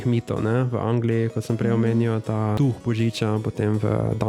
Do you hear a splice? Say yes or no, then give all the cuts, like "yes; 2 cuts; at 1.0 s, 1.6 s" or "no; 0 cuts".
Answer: yes; 1 cut; at 2.6 s